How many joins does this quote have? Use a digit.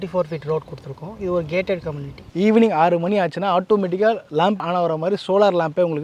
2